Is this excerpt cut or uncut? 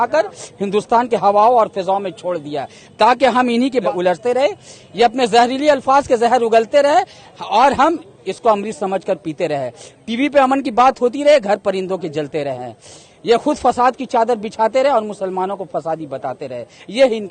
cut